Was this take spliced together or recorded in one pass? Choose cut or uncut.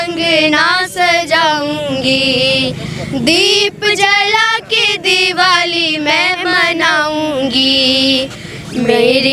uncut